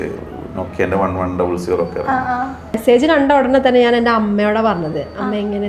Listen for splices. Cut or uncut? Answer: cut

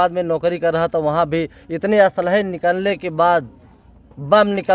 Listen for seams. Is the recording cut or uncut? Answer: uncut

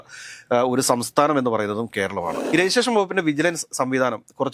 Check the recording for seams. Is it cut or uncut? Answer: cut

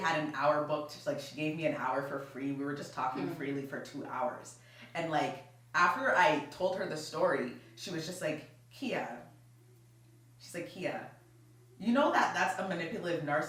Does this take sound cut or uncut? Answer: uncut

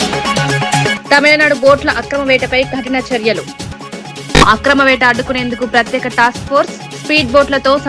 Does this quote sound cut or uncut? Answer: cut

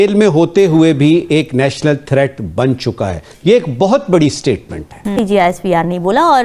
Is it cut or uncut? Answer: cut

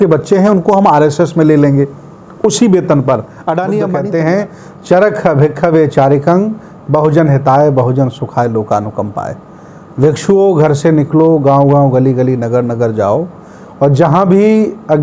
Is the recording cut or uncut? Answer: cut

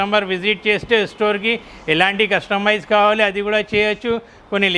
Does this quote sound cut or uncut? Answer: uncut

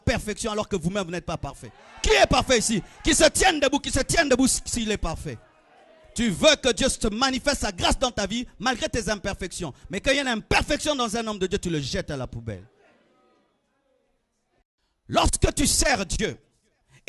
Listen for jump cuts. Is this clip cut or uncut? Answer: cut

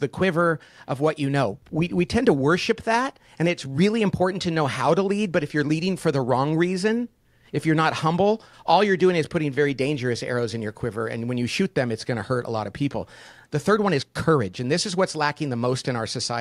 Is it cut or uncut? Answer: cut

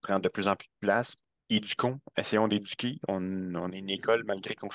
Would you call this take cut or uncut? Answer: cut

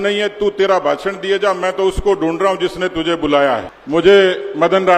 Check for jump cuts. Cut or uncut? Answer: cut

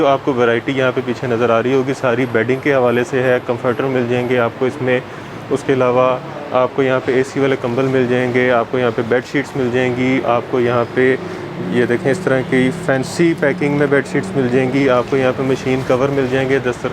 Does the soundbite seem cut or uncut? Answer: uncut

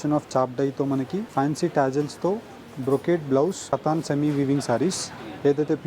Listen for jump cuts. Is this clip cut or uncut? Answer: cut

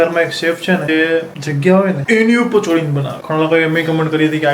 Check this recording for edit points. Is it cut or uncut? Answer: cut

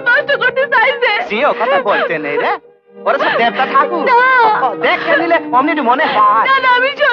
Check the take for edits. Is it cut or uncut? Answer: uncut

